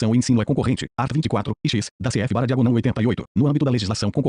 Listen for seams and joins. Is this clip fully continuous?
no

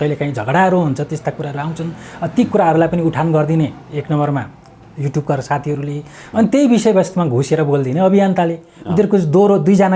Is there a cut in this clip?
no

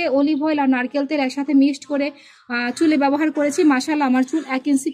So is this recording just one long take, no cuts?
yes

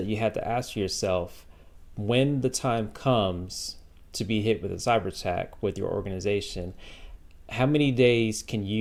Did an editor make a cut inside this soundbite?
no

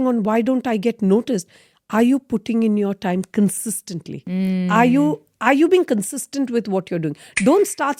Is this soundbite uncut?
yes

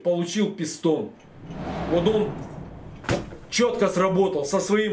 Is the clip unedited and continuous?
no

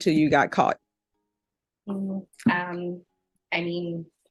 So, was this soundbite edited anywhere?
no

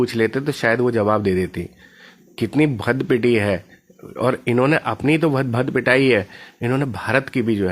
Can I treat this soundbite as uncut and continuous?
yes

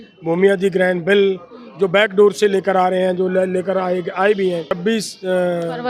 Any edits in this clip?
yes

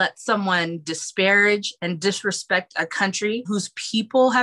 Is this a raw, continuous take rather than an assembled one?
no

